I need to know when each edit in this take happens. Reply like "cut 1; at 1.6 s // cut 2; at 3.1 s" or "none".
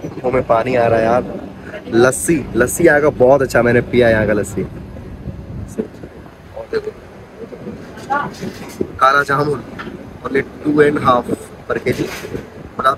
none